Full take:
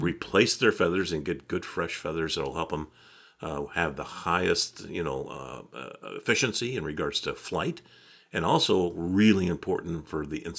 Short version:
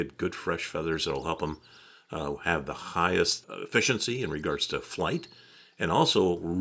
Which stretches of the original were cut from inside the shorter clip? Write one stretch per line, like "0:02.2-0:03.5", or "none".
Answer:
0:04.7-0:06.0